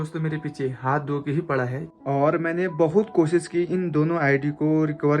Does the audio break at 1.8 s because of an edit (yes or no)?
yes